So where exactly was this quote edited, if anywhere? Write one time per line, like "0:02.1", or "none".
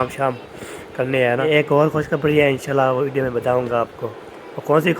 0:01.5

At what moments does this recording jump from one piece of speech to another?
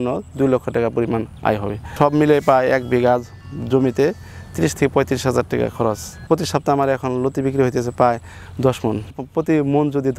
0:01.9
0:06.3

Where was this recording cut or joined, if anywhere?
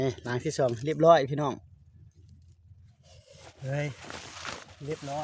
none

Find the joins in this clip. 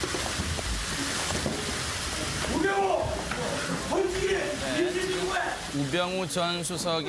none

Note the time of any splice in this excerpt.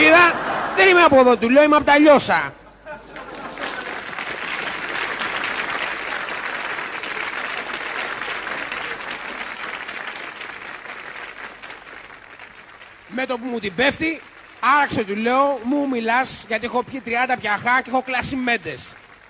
0:16.7

